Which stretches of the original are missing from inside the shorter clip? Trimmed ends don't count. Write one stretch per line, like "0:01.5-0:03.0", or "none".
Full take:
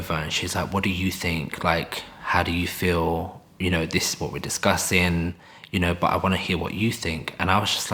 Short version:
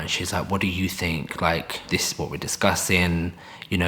0:02.1-0:03.9